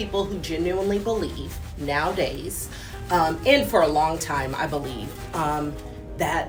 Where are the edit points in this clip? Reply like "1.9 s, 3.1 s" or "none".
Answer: none